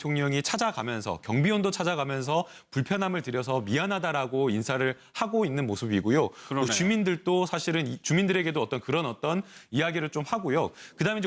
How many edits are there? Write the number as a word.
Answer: one